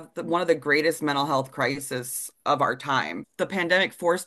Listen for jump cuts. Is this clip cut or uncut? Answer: cut